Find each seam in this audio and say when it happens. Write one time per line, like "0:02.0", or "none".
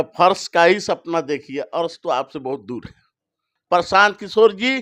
0:03.5

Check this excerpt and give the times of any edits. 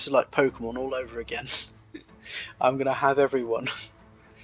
none

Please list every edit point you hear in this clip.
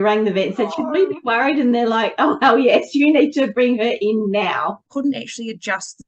0:04.8

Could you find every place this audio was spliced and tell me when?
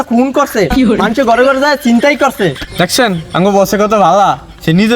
0:02.8

